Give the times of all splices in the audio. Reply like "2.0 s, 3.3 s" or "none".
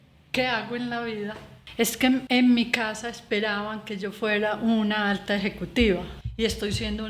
1.9 s, 6.2 s